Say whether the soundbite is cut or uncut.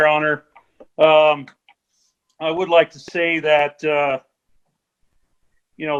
uncut